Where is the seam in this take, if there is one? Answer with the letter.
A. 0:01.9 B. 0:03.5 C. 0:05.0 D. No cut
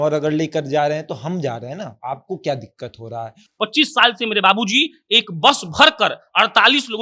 B